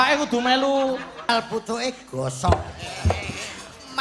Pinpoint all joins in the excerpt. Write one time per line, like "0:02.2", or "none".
0:01.3